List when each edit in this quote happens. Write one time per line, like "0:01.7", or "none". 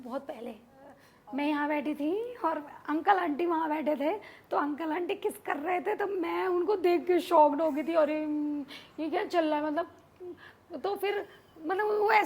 0:01.1